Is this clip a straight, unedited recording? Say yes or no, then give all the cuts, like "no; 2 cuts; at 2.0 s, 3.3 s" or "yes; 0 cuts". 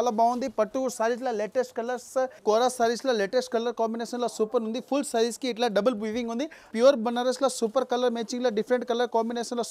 no; 2 cuts; at 2.4 s, 6.7 s